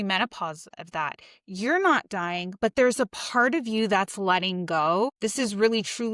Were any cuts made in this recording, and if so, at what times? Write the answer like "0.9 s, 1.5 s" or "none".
none